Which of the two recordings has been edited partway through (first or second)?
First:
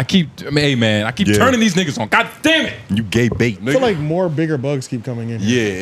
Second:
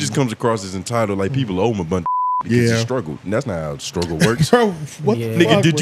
first